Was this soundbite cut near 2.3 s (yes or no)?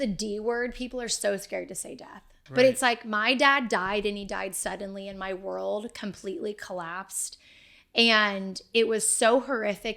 yes